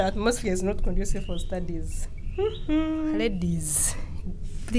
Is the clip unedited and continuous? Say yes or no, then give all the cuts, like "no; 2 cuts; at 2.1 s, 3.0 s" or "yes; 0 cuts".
no; 1 cut; at 3.2 s